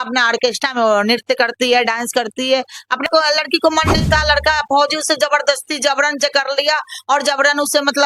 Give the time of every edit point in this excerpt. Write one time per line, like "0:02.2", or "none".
0:03.1